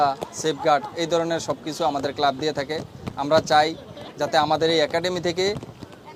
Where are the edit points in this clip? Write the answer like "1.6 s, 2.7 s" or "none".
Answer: none